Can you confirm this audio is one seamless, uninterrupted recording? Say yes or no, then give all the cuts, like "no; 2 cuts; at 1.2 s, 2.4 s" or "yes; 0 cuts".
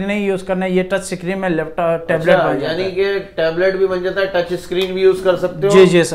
yes; 0 cuts